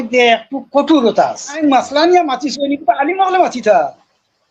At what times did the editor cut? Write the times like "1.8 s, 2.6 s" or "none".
1.6 s